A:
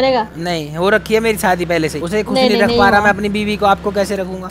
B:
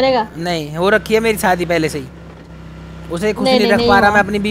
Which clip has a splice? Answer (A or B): A